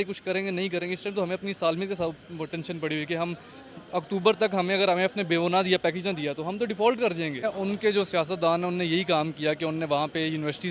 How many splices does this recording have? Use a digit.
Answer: 1